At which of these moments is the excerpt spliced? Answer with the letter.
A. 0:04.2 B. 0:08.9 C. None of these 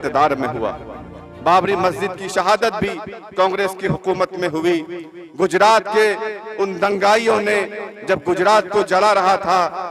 C